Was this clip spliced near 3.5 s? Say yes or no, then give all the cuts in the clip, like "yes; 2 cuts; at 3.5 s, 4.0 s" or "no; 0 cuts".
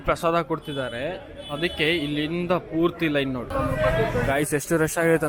yes; 1 cut; at 3.5 s